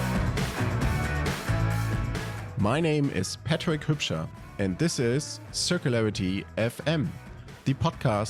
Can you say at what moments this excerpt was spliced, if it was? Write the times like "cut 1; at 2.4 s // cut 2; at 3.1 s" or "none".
none